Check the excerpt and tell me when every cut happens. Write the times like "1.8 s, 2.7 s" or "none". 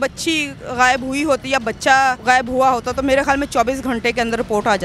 2.2 s